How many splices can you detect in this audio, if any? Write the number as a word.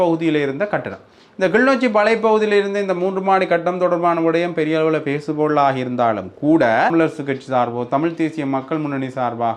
one